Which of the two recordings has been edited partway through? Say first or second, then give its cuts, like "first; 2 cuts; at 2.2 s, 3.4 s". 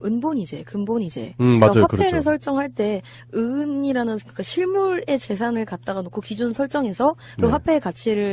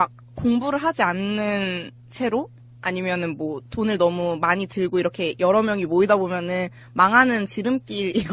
second; 1 cut; at 3.6 s